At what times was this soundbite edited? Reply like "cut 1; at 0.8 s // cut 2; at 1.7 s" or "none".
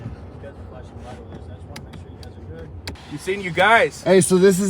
cut 1; at 2.9 s